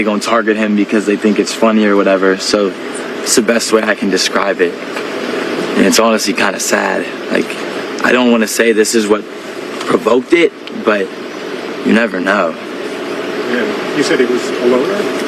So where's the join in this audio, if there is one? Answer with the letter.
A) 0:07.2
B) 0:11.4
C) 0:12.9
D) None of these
D